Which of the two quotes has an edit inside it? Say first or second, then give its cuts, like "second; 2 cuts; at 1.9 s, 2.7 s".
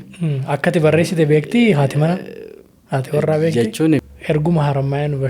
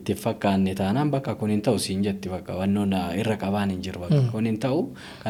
first; 1 cut; at 4.0 s